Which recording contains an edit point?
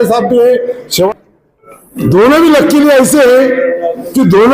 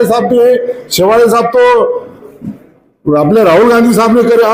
first; 1 cut; at 1.1 s

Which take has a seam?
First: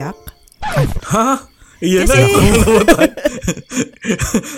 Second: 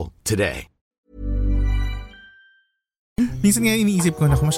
second; 1 cut; at 3.2 s

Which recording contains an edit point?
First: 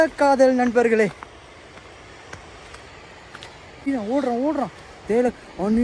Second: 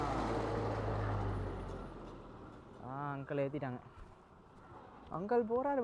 first; 1 cut; at 3.9 s

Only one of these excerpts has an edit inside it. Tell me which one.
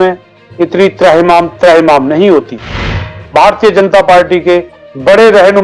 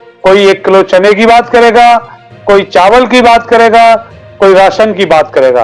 first; 1 cut; at 2.7 s

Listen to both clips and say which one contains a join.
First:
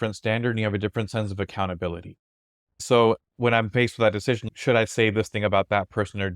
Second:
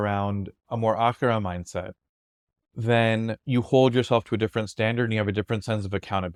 first; 2 cuts; at 2.8 s, 4.5 s

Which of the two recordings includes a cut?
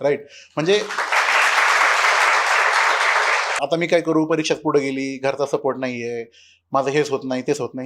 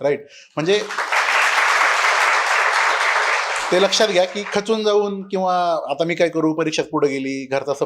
first; 1 cut; at 3.6 s

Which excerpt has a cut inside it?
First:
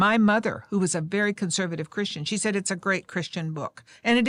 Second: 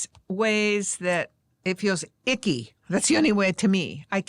second; 1 cut; at 1.7 s

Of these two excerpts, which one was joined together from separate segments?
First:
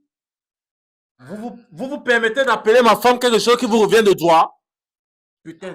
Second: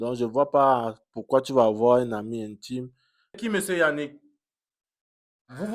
second; 1 cut; at 3.4 s

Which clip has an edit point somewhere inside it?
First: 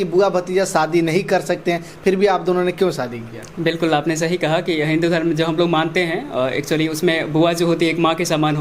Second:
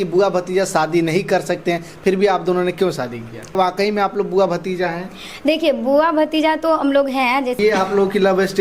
second; 2 cuts; at 3.6 s, 7.6 s

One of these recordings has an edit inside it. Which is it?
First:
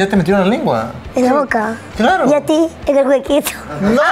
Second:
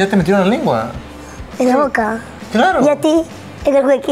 first; 3 cuts; at 1.0 s, 1.8 s, 2.8 s

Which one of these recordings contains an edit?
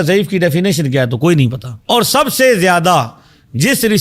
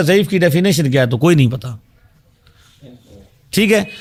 first; 1 cut; at 1.7 s

